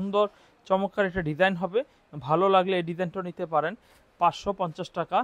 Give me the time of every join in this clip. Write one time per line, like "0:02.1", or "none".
none